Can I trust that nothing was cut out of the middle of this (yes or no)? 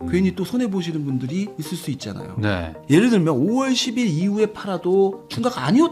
no